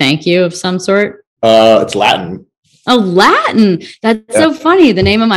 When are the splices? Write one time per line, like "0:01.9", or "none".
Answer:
0:01.2